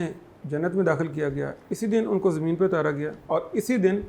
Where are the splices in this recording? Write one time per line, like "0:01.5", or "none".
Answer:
0:03.2